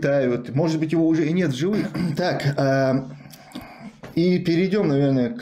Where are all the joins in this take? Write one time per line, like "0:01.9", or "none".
0:01.9